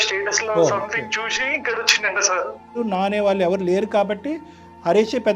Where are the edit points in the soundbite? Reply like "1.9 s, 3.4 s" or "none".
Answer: 2.8 s